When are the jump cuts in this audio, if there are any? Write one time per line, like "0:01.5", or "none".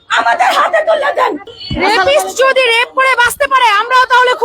0:01.5